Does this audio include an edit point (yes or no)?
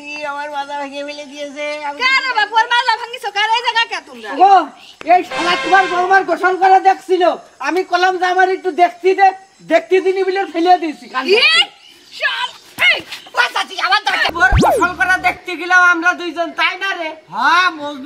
yes